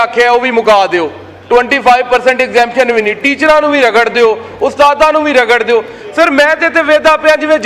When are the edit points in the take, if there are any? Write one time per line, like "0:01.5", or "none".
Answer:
none